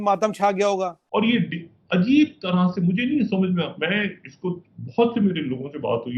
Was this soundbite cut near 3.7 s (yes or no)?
no